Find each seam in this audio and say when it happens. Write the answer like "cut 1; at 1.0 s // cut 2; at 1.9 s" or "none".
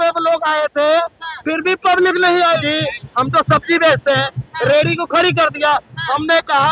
cut 1; at 2.6 s